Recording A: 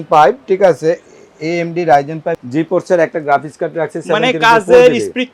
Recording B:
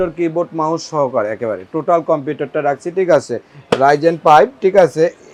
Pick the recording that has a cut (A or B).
A